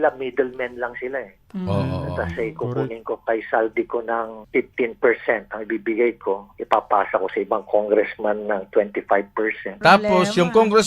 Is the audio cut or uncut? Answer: cut